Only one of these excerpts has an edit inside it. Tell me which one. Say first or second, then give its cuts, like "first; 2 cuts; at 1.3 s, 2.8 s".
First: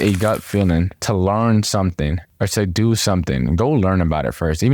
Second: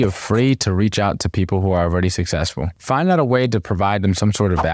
first; 1 cut; at 1.0 s